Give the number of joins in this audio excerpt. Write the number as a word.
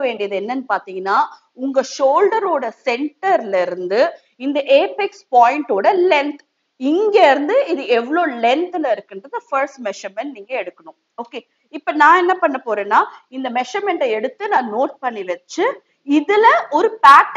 zero